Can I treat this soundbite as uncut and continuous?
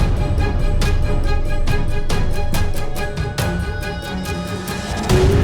yes; 0 cuts

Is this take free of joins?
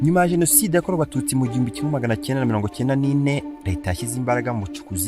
no; 1 cut; at 3.6 s

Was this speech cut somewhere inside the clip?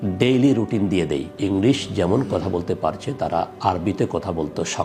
yes; 1 cut; at 1.3 s

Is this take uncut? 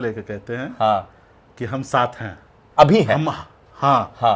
yes; 0 cuts

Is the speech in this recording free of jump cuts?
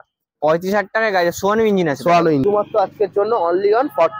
no; 1 cut; at 2.4 s

